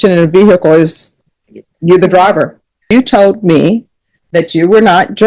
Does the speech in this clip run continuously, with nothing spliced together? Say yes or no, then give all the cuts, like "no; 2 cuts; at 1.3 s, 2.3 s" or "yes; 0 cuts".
no; 1 cut; at 2.9 s